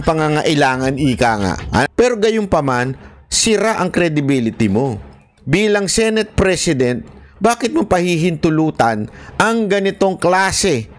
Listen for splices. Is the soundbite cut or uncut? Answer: cut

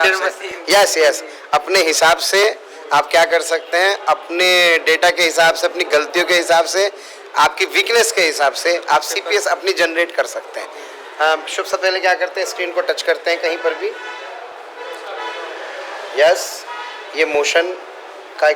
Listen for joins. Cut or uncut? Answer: uncut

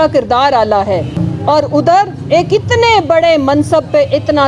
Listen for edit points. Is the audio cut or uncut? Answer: cut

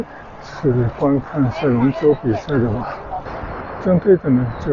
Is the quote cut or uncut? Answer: cut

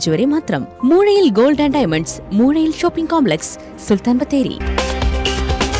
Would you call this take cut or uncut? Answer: uncut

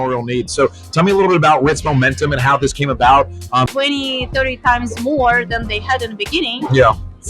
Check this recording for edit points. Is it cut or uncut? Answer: cut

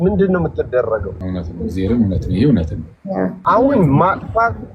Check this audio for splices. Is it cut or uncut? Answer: cut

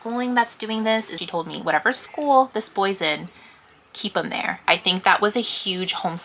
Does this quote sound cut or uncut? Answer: cut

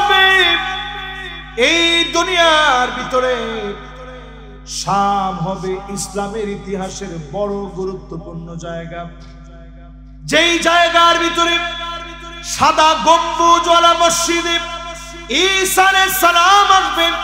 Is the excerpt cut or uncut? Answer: uncut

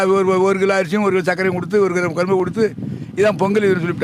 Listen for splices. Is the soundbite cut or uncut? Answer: uncut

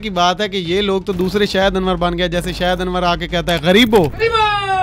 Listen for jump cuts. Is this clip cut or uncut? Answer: uncut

